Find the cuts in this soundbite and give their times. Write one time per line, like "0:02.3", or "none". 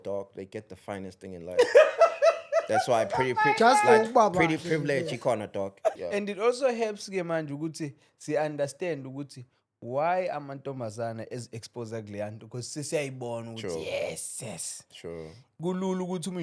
0:05.9